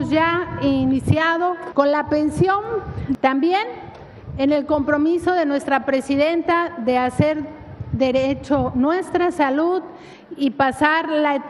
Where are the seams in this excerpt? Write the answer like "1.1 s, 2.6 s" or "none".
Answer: 1.6 s, 3.1 s